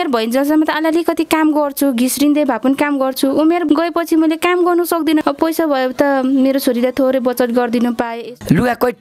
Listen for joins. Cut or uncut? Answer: cut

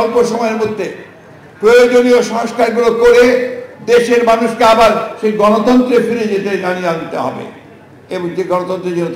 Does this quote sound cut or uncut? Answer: uncut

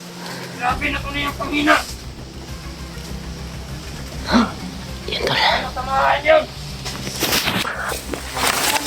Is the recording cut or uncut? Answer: uncut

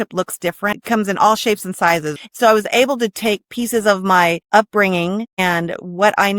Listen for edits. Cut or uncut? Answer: cut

